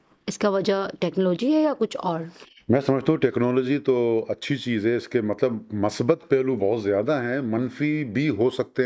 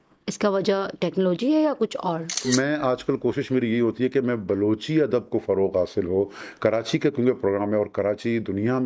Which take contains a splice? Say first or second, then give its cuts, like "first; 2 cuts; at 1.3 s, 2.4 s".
second; 1 cut; at 2.5 s